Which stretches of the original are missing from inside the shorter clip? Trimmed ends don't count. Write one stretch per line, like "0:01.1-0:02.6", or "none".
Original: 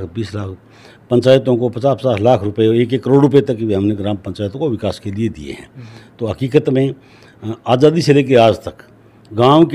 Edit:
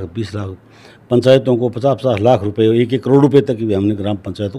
none